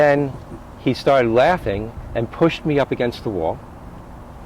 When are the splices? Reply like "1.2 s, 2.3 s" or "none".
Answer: none